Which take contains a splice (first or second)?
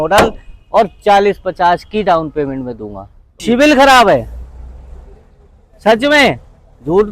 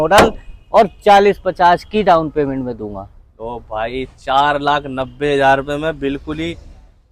first